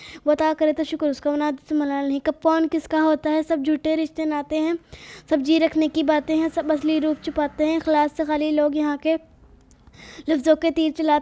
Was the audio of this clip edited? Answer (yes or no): no